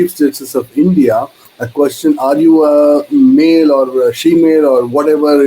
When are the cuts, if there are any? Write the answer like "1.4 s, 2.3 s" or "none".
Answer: none